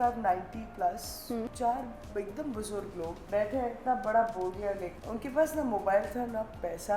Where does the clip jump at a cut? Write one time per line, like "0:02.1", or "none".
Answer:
0:01.5
0:03.2
0:04.9